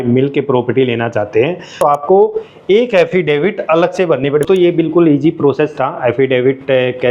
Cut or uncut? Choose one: cut